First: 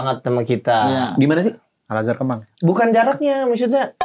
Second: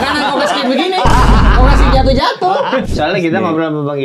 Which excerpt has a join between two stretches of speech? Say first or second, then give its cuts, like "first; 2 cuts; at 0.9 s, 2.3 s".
second; 1 cut; at 2.9 s